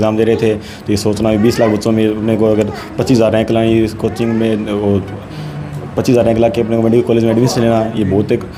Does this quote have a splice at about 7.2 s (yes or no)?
no